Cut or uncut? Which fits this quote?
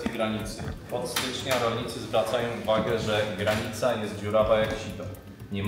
uncut